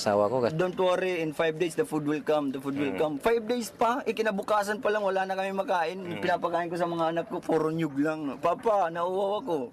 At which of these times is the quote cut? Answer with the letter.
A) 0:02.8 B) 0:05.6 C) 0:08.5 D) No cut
B